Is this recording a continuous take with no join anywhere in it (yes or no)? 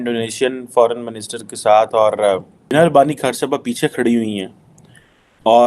no